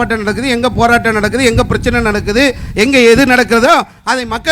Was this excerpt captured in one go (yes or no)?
yes